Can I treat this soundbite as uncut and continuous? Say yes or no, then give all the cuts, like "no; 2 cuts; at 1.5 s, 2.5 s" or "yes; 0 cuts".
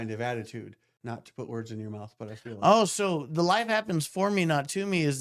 no; 1 cut; at 0.9 s